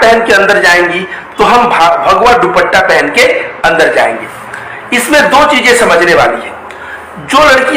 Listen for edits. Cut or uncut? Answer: uncut